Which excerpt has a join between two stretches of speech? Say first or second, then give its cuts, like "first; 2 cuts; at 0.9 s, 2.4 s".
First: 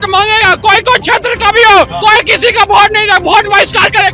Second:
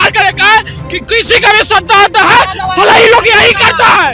first; 1 cut; at 1.9 s